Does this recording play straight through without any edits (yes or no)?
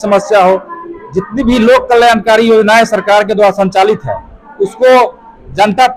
yes